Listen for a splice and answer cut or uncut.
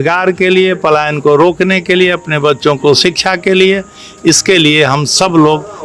uncut